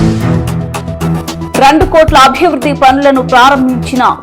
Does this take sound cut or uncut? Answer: cut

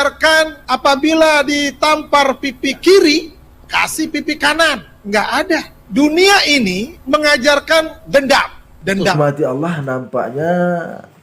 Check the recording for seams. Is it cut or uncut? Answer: cut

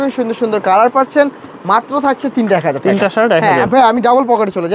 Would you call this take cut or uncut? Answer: uncut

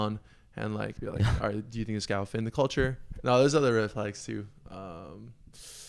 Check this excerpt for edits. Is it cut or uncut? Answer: cut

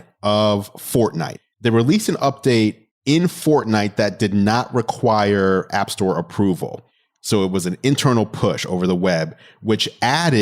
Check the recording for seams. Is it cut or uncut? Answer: cut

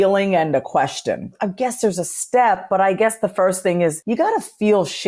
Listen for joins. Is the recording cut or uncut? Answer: cut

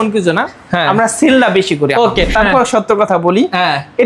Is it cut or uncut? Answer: cut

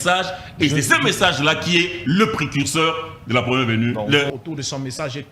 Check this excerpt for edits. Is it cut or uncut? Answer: cut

